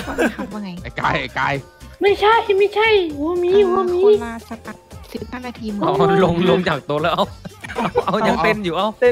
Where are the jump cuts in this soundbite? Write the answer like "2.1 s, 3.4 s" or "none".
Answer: none